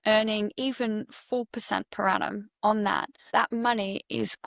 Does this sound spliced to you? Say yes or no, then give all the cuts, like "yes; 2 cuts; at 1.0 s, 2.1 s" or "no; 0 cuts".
yes; 1 cut; at 3.2 s